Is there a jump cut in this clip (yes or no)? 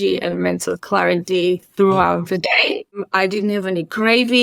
yes